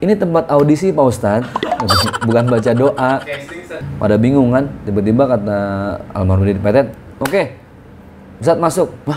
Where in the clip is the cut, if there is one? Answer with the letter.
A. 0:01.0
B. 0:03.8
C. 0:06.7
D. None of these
B